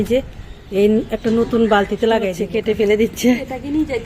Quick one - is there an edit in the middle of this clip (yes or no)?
yes